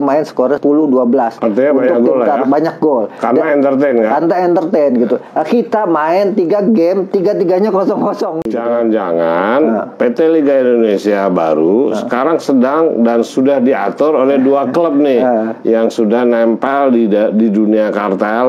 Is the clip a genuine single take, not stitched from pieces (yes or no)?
no